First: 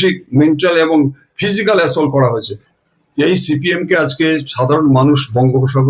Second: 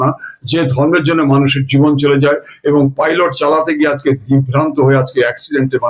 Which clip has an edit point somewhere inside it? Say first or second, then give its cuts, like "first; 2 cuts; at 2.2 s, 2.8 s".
first; 1 cut; at 2.7 s